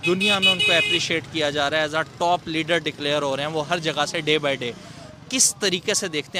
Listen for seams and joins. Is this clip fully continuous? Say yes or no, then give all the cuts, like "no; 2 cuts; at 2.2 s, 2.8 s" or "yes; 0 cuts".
yes; 0 cuts